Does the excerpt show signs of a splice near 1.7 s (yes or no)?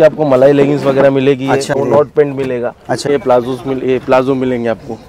yes